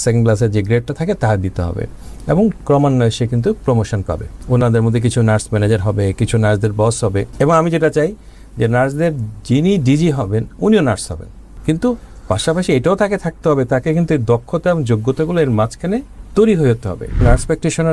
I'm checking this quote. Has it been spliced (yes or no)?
yes